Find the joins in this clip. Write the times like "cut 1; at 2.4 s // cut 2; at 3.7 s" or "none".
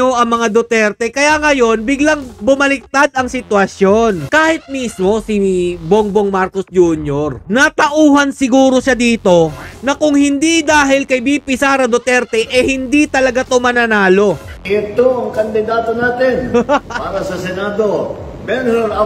cut 1; at 4.2 s // cut 2; at 14.6 s